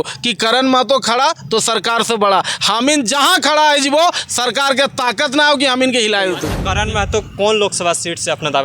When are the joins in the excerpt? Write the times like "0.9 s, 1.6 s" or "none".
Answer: 6.8 s